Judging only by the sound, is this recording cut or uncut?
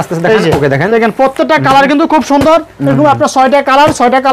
uncut